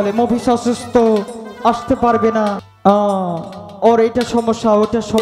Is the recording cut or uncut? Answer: cut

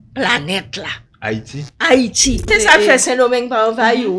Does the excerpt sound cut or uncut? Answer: cut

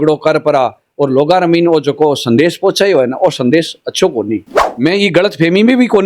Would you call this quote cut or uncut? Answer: cut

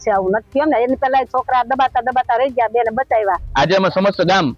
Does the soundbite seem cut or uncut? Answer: cut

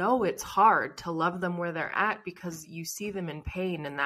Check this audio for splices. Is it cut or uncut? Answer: uncut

